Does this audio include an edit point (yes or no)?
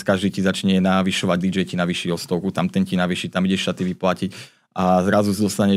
no